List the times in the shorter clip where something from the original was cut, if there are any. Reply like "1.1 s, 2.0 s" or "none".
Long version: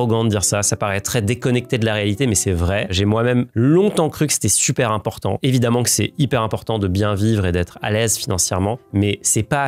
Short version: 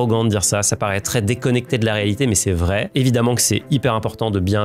2.9 s